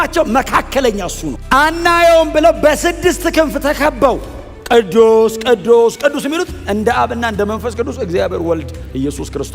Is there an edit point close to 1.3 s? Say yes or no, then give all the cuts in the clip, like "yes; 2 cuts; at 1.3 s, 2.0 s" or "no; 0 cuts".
yes; 1 cut; at 1.3 s